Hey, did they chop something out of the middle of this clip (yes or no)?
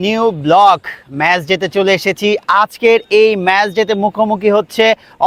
no